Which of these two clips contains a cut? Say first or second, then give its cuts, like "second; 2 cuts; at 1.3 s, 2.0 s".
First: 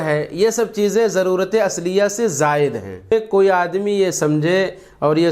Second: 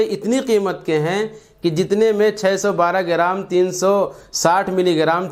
first; 1 cut; at 3.1 s